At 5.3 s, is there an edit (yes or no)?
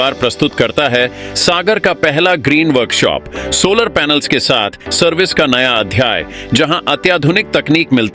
no